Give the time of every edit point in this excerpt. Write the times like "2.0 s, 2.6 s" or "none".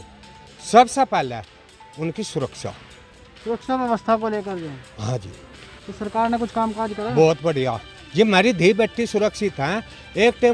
none